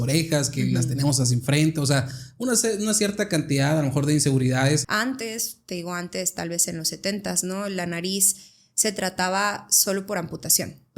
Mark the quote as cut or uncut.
cut